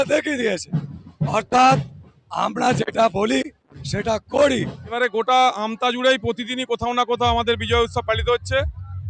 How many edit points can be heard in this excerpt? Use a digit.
1